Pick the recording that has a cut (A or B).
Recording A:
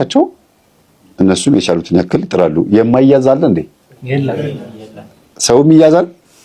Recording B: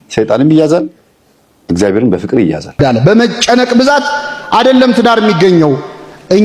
B